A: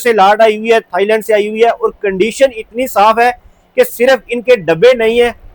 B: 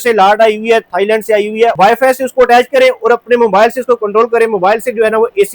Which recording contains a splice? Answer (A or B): B